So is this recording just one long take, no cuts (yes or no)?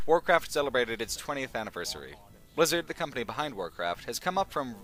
yes